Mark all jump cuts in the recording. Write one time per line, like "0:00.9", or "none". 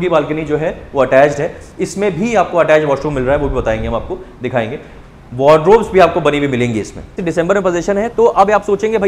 0:07.2